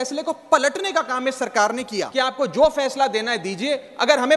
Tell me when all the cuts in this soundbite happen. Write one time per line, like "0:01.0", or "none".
0:02.1